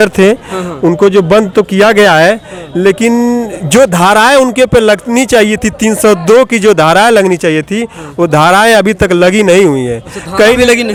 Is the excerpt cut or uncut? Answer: uncut